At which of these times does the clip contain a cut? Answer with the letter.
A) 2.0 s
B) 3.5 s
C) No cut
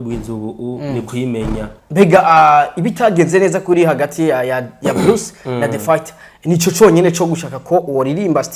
A